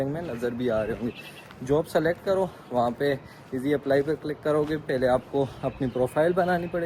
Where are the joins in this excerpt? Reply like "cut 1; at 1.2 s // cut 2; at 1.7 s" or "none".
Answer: none